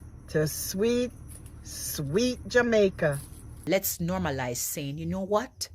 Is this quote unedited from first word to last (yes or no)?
no